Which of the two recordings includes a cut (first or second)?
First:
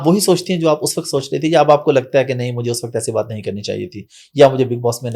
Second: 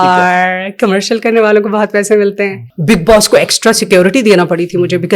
second